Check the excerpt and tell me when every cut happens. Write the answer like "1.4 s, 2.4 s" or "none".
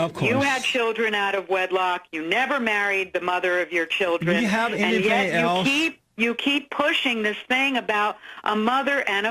none